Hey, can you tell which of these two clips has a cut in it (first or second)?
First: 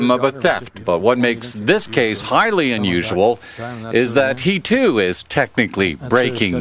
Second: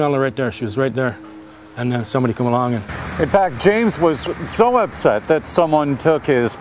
first